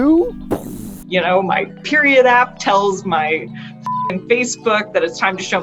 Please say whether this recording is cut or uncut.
cut